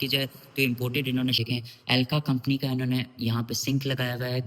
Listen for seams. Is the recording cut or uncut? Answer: cut